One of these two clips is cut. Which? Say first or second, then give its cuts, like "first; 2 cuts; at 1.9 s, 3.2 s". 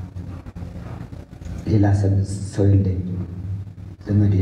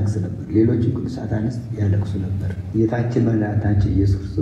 second; 1 cut; at 2.6 s